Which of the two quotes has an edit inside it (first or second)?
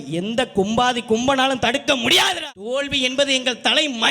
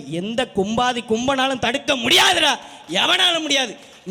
first